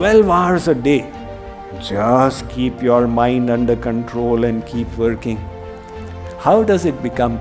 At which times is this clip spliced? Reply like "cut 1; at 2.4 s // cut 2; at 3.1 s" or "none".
none